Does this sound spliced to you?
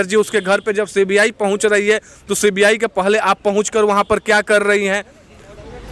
no; 0 cuts

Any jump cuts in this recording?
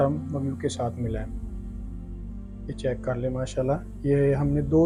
no; 0 cuts

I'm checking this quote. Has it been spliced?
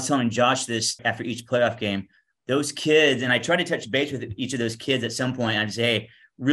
yes; 1 cut; at 1.0 s

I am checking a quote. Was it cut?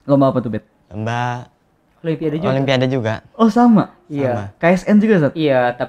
no; 0 cuts

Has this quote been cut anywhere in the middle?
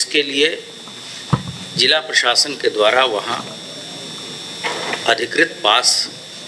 no; 0 cuts

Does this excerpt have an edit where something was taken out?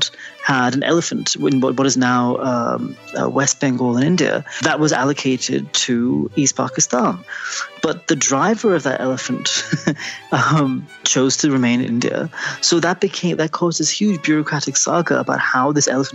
yes; 1 cut; at 4.6 s

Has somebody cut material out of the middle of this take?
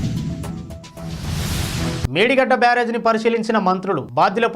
yes; 1 cut; at 2.1 s

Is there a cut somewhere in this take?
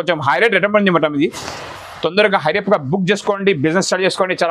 no; 0 cuts

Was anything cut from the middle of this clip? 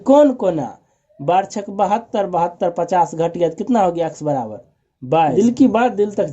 yes; 1 cut; at 5.3 s

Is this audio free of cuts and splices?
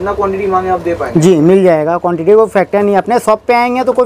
yes; 0 cuts

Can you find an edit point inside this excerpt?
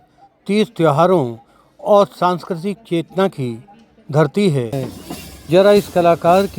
yes; 1 cut; at 4.9 s

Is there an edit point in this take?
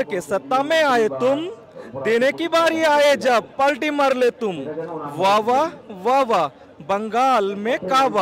no; 0 cuts

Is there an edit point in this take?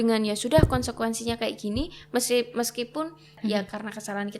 yes; 1 cut; at 3.4 s

